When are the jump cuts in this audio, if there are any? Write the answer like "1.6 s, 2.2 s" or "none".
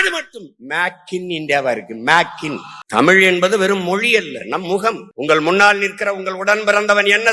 2.7 s